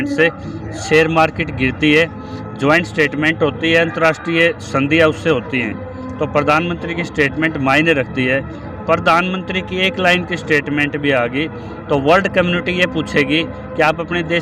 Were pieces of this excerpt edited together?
no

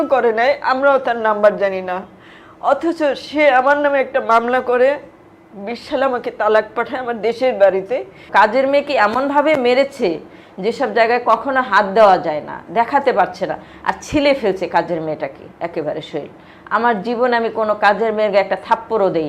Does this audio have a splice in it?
yes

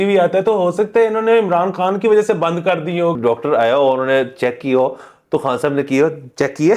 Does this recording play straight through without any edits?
no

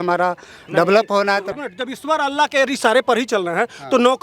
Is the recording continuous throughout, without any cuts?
no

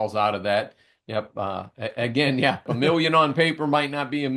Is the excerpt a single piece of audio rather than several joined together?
no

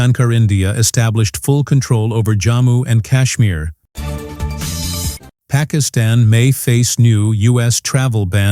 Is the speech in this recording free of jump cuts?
no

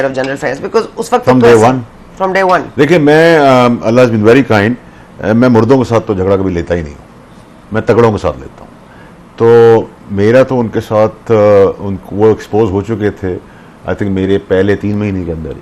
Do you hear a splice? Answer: no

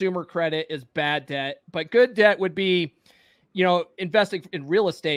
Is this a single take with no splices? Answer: yes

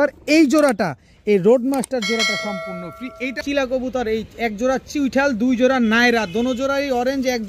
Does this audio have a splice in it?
yes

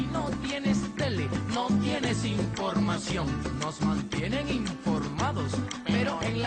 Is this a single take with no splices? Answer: yes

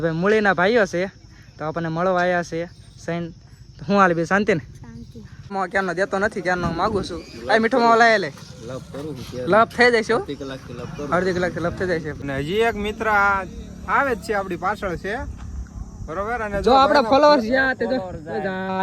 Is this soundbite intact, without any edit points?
no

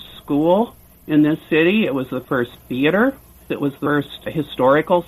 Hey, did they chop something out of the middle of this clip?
yes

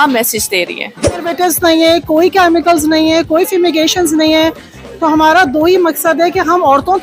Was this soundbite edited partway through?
yes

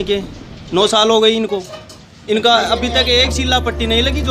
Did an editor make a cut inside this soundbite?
no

